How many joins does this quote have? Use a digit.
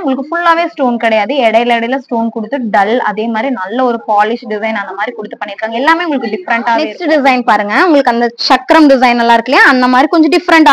1